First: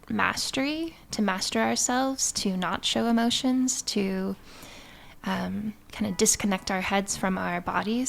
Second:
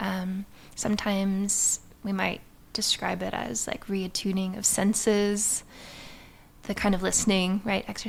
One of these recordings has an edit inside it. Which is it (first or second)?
first